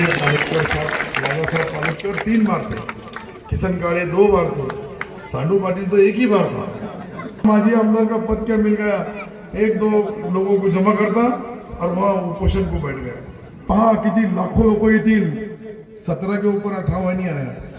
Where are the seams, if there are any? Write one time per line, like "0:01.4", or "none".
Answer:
0:07.4
0:13.6